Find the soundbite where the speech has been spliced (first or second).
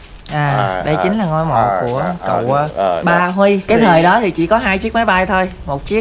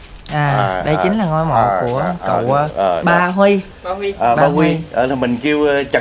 first